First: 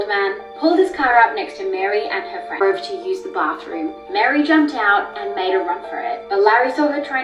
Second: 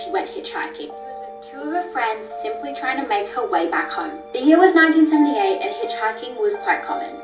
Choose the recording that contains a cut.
first; 1 cut; at 2.6 s

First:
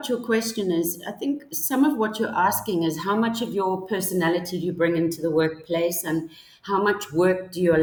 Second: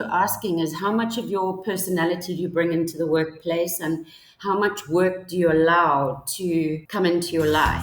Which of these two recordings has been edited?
second; 1 cut; at 6.8 s

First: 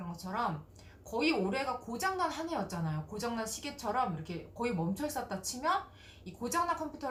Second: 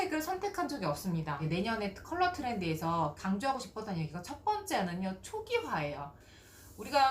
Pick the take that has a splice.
second; 2 cuts; at 1.4 s, 3.2 s

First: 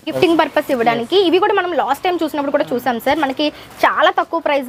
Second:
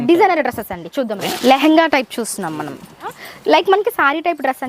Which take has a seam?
second; 2 cuts; at 1.3 s, 3.1 s

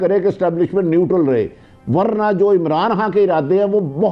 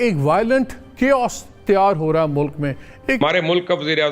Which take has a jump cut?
second; 1 cut; at 3.2 s

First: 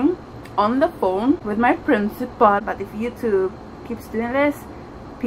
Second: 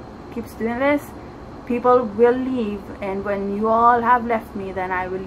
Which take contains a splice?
first; 2 cuts; at 1.5 s, 2.6 s

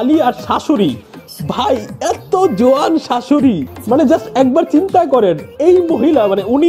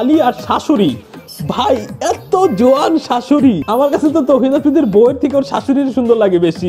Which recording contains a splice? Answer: second; 1 cut; at 3.6 s

